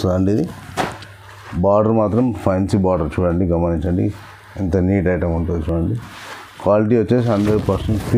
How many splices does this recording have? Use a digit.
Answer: 0